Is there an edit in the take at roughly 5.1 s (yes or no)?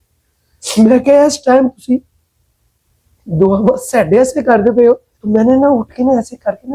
yes